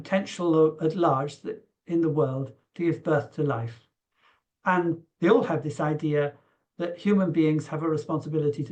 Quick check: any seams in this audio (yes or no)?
no